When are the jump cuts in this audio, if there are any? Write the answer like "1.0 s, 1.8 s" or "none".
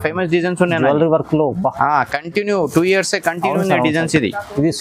none